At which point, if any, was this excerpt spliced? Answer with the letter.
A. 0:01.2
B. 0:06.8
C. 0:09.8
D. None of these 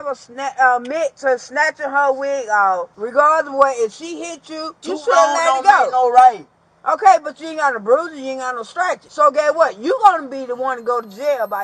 D